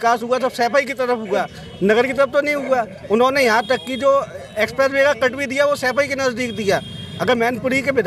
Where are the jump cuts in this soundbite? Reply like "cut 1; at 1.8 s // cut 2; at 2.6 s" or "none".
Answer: none